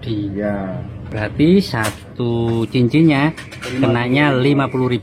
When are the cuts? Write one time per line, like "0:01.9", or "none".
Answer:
0:01.1